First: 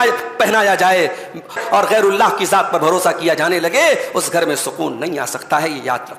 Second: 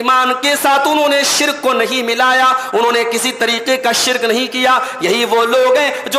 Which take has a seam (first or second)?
first